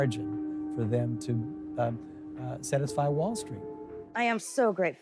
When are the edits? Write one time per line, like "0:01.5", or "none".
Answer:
0:04.1